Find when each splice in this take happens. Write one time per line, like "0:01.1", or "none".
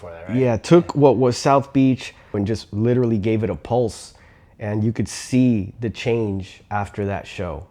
0:02.4